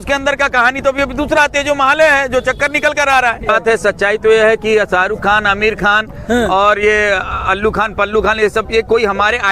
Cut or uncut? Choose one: cut